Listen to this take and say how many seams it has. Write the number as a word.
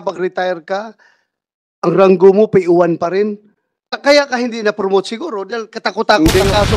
one